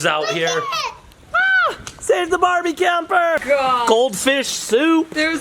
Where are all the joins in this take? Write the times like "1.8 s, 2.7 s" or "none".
3.4 s